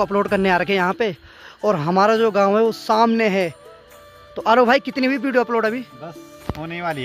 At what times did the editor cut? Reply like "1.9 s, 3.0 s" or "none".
none